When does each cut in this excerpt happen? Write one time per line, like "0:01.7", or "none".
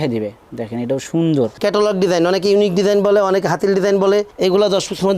0:01.5